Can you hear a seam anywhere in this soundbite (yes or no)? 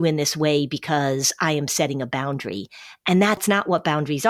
no